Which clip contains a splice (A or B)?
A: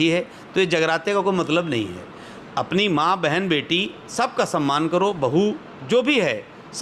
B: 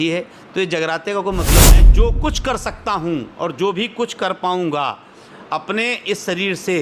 B